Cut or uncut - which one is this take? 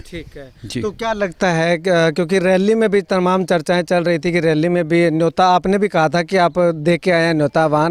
uncut